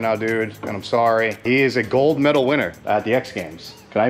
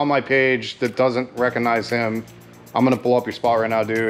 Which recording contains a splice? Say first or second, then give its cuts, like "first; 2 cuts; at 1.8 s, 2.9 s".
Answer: first; 2 cuts; at 1.5 s, 2.8 s